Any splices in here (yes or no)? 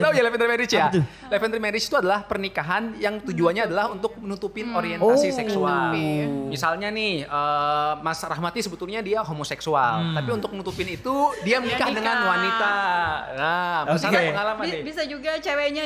no